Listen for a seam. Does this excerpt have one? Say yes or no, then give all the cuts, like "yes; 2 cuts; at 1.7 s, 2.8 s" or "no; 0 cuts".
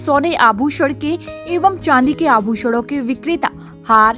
no; 0 cuts